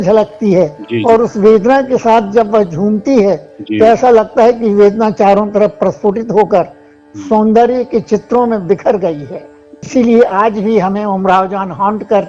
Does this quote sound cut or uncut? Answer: cut